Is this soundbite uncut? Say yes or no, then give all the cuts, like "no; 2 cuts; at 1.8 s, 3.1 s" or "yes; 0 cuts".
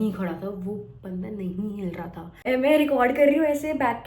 no; 1 cut; at 2.4 s